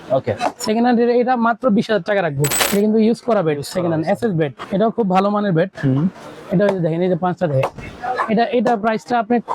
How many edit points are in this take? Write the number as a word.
two